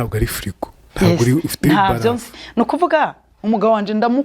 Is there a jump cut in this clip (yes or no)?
yes